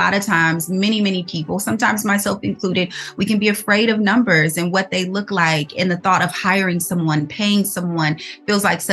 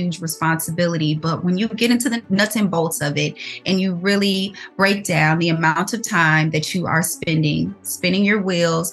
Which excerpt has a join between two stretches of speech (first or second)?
second